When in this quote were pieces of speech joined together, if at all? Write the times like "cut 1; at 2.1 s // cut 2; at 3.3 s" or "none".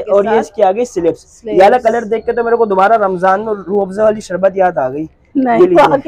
none